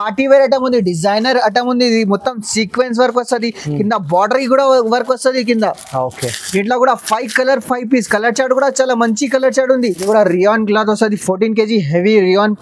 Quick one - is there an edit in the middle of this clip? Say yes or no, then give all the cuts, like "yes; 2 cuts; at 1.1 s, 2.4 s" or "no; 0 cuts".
yes; 1 cut; at 10.0 s